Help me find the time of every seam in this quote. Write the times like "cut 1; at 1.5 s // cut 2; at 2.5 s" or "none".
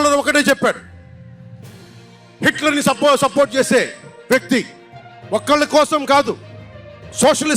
cut 1; at 0.9 s // cut 2; at 2.2 s